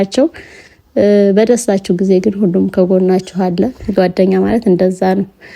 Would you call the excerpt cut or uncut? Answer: cut